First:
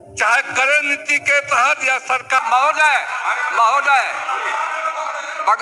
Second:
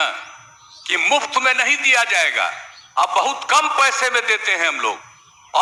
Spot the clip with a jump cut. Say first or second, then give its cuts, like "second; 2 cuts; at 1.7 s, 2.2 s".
first; 1 cut; at 2.4 s